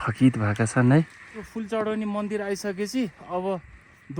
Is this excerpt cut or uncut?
cut